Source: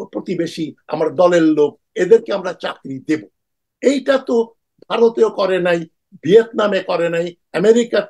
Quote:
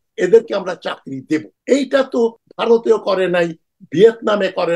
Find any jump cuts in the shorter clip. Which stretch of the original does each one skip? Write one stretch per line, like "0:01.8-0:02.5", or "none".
0:03.3-0:03.7
0:04.6-0:04.8